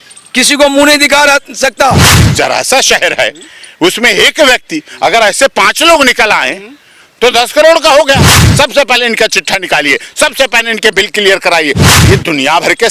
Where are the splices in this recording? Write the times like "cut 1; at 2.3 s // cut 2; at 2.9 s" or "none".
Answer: cut 1; at 2.1 s // cut 2; at 8.4 s // cut 3; at 11.8 s